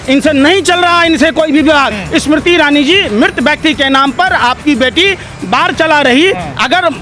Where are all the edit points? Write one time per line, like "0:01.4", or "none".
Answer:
0:01.9